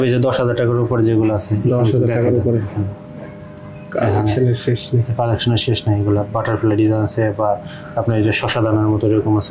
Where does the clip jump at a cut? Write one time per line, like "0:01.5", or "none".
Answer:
none